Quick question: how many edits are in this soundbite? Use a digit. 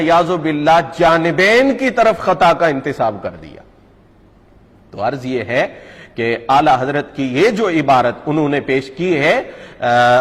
0